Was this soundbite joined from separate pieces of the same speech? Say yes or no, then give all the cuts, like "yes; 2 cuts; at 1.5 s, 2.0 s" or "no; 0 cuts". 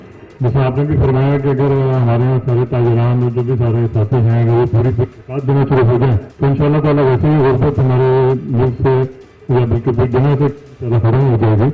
yes; 1 cut; at 6.3 s